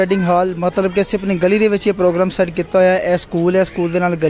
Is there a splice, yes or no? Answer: no